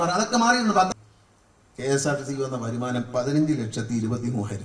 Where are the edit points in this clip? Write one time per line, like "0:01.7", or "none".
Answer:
0:00.9